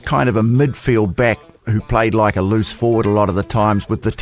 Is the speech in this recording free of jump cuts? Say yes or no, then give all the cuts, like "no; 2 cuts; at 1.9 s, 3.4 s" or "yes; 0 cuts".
yes; 0 cuts